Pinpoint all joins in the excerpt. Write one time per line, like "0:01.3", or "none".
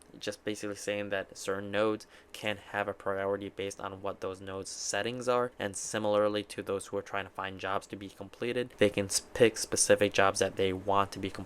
0:05.5
0:08.7